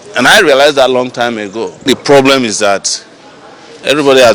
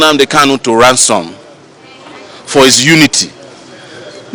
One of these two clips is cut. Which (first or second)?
first